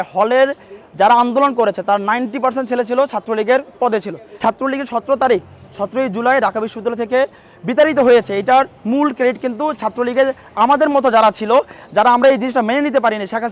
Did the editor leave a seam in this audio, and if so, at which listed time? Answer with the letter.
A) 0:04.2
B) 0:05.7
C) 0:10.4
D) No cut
A